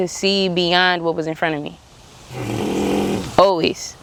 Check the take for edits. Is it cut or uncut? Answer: uncut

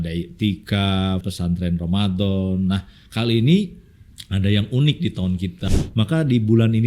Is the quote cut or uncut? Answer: cut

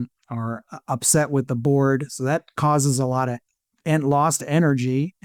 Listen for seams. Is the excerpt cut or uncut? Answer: uncut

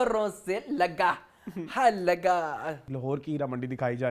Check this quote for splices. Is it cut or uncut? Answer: cut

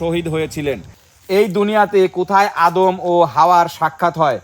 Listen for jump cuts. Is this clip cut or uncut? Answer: cut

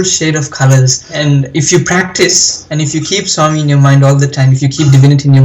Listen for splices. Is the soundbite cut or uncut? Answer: cut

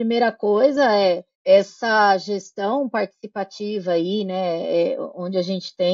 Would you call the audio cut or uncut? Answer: cut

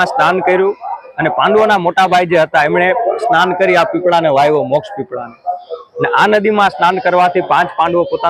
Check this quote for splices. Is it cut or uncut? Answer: uncut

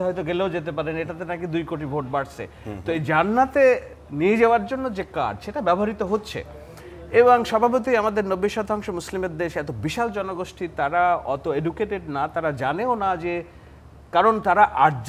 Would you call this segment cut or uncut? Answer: uncut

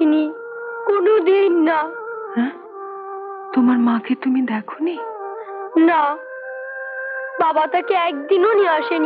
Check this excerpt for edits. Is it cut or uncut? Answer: uncut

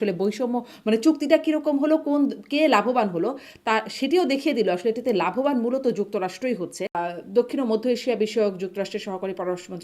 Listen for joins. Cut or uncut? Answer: cut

